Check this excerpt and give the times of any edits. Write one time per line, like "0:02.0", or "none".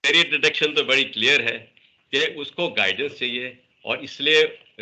none